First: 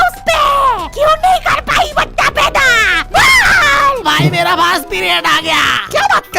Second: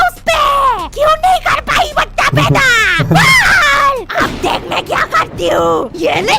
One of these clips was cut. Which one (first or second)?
first